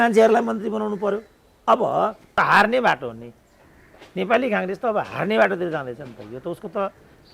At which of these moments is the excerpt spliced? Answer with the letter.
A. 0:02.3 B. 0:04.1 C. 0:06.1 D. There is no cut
A